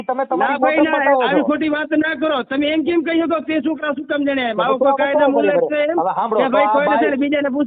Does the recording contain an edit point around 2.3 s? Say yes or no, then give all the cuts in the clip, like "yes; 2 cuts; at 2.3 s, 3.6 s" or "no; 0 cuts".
no; 0 cuts